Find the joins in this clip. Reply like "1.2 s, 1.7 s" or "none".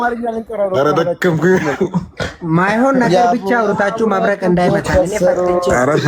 none